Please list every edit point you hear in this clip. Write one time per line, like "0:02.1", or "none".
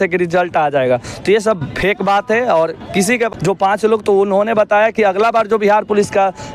0:03.3